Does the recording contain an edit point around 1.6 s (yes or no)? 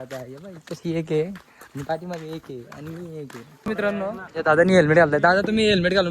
no